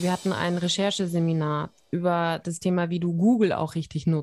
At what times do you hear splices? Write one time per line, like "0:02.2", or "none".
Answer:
none